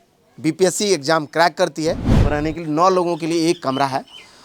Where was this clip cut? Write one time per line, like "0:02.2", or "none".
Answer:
0:02.1